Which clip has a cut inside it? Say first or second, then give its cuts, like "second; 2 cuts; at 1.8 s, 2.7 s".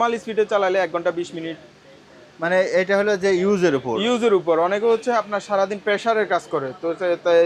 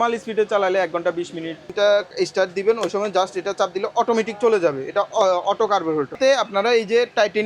second; 2 cuts; at 1.7 s, 6.2 s